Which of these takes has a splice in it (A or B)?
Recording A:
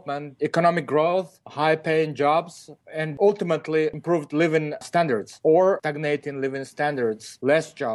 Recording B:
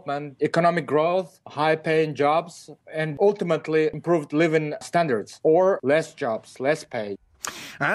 B